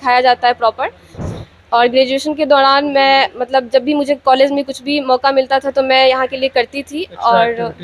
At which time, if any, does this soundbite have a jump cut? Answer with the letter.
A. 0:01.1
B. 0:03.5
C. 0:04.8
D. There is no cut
A